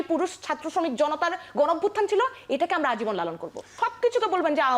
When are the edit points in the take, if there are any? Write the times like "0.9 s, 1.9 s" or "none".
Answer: 3.7 s